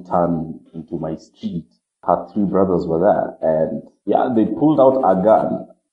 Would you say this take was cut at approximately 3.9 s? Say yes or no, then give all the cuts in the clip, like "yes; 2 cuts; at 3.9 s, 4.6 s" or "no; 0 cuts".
no; 1 cut; at 2.0 s